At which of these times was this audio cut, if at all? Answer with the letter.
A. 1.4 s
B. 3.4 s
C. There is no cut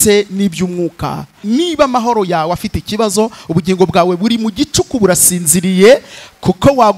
A